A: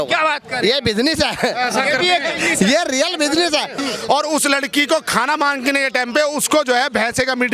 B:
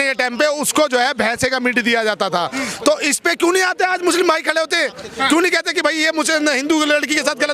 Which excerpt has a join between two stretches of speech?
A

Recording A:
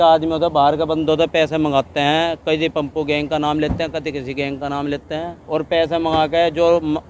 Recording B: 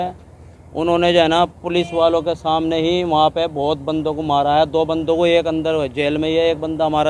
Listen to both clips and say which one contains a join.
A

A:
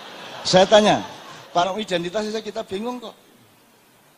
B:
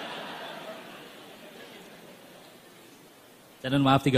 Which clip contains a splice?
A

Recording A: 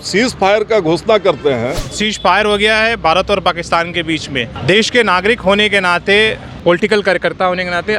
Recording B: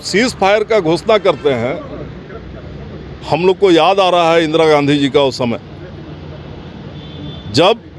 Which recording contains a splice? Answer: A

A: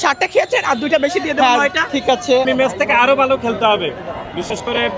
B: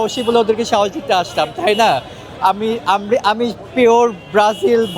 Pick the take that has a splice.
A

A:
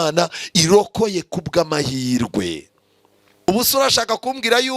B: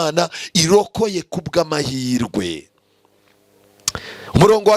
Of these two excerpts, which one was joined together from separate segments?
A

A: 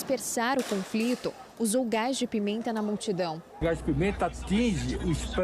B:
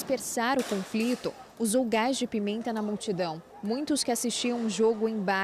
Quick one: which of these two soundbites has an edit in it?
A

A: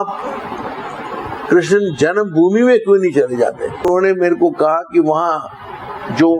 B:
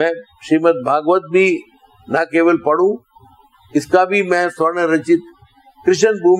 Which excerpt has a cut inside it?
A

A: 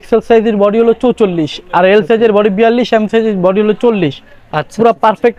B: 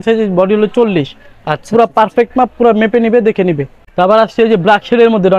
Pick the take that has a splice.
B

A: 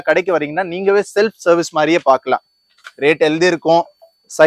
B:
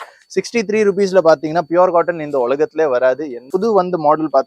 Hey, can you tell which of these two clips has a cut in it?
B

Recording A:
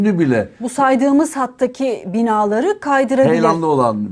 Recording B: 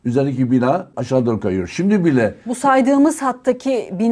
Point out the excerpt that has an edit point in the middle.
B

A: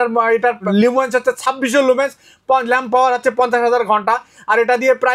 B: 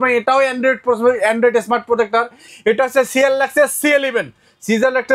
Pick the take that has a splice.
B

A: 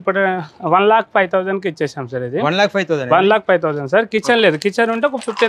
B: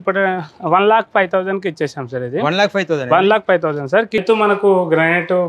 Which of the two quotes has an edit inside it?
B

